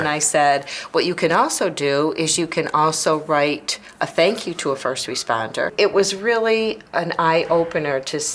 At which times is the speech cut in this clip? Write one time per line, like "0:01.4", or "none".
0:05.7